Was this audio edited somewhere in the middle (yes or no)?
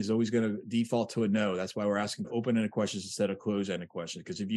yes